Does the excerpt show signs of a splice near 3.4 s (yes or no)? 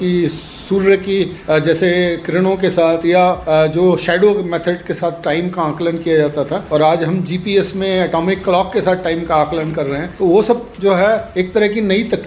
yes